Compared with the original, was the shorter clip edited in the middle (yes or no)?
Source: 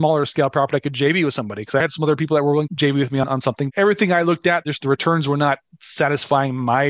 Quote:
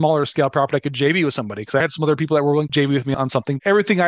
yes